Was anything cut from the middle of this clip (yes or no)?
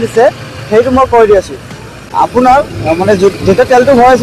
no